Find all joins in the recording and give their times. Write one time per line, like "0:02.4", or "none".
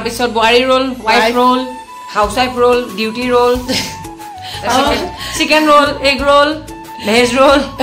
none